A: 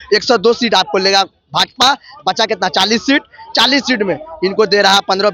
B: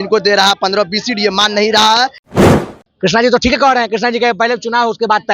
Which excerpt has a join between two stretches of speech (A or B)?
B